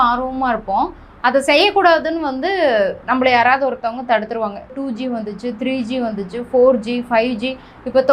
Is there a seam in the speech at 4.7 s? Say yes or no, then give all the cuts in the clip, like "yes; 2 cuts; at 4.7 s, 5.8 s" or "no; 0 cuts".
yes; 1 cut; at 4.7 s